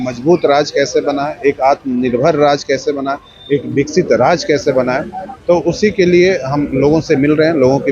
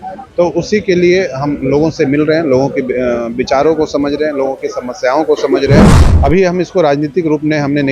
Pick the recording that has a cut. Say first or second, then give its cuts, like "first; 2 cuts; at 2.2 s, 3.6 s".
second; 1 cut; at 6.0 s